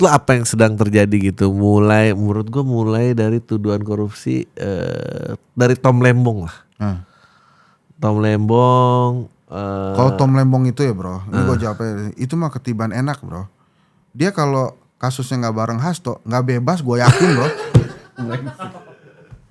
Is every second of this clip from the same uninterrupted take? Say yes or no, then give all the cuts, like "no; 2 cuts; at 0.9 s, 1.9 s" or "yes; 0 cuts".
yes; 0 cuts